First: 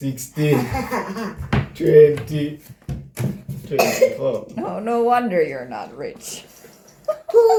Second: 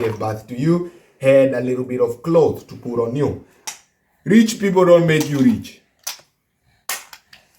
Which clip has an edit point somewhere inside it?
second; 1 cut; at 3.5 s

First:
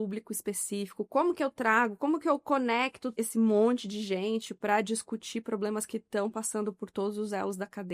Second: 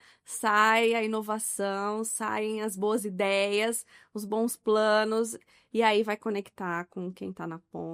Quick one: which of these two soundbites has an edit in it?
first; 1 cut; at 3.0 s

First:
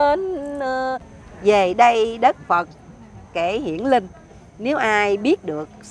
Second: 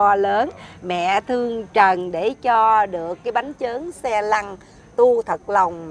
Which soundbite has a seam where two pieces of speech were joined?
first; 1 cut; at 1.1 s

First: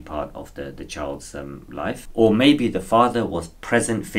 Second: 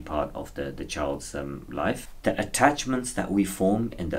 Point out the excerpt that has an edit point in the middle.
second; 1 cut; at 2.1 s

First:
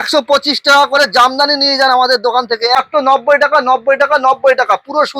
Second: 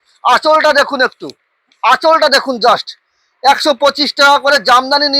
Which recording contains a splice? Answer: first; 1 cut; at 2.7 s

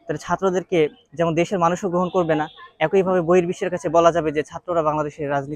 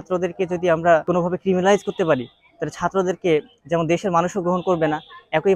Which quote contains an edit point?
second; 1 cut; at 1.0 s

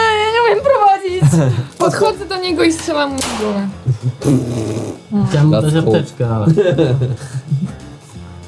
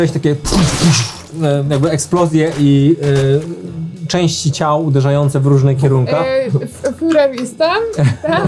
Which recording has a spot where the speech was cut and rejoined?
first; 1 cut; at 1.8 s

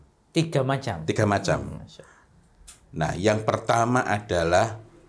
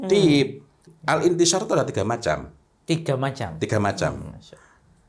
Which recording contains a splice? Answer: second; 1 cut; at 0.9 s

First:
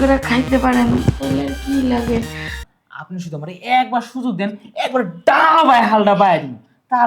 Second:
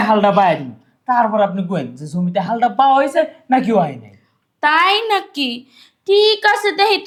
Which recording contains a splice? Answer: first; 1 cut; at 2.6 s

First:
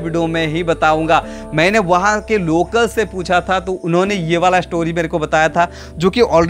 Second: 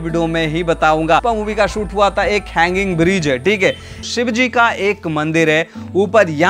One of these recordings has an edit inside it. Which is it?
second; 2 cuts; at 1.2 s, 3.9 s

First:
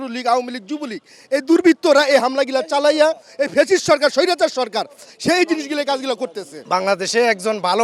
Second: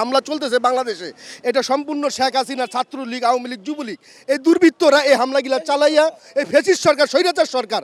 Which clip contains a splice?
first; 1 cut; at 6.5 s

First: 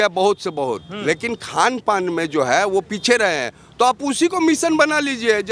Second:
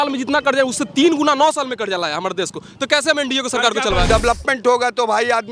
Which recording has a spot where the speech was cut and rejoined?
second; 1 cut; at 4.1 s

